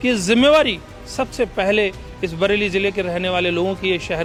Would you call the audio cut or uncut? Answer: uncut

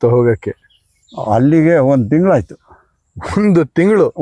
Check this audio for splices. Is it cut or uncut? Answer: uncut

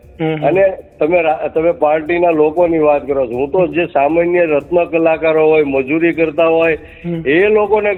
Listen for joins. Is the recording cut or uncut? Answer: uncut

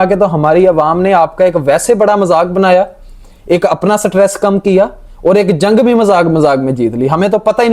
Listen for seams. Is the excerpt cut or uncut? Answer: uncut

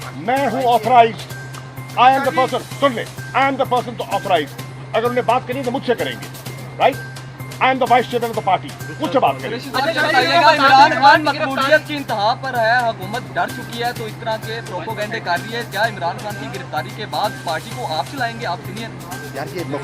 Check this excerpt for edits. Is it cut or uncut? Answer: uncut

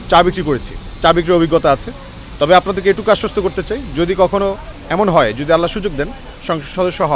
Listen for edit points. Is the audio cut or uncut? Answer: cut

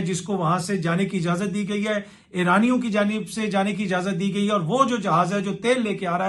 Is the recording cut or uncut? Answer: uncut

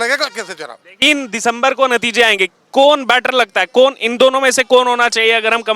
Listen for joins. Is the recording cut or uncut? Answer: cut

